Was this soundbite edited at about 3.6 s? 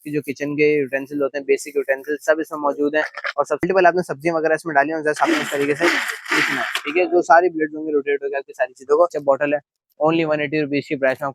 yes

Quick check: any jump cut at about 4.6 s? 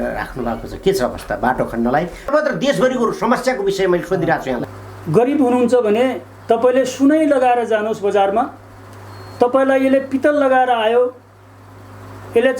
yes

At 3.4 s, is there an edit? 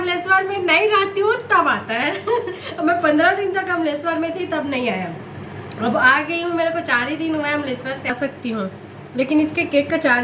no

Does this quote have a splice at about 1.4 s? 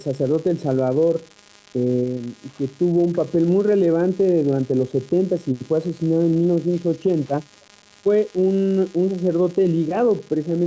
no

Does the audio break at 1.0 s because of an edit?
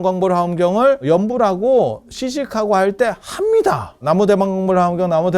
yes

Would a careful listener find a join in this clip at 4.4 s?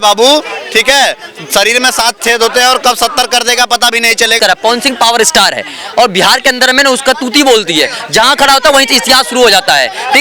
yes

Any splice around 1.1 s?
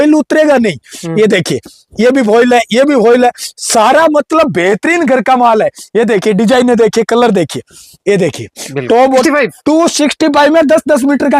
no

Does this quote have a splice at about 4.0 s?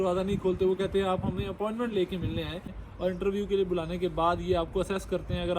no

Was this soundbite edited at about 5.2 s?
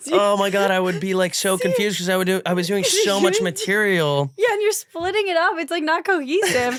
no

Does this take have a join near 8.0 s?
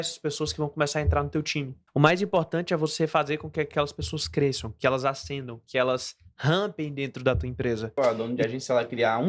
yes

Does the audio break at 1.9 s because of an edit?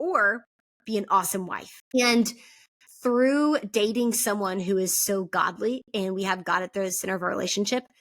yes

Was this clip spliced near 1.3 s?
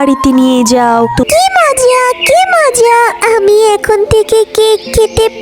yes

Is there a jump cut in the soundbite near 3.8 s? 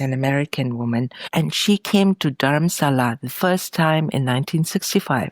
no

